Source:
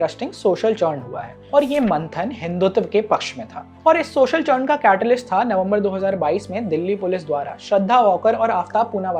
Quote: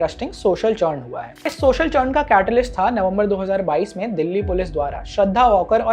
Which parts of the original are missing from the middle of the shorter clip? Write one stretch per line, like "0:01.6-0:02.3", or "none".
0:01.5-0:04.0

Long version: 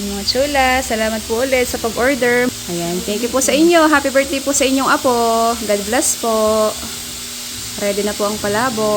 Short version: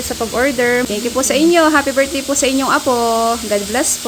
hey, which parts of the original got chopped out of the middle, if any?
0:02.6-0:03.1

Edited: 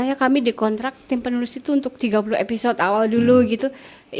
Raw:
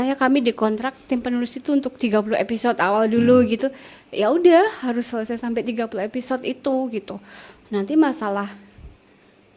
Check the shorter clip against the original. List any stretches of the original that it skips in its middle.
none

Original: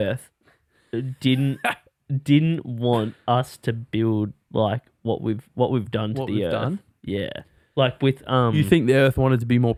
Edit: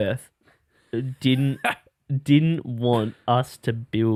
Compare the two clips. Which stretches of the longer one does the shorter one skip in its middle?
none

